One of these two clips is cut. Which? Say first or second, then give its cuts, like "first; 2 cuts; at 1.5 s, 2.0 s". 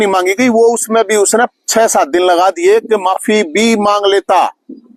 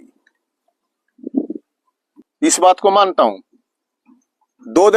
second; 1 cut; at 2.2 s